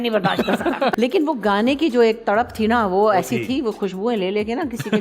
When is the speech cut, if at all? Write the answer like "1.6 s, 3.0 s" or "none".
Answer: 0.9 s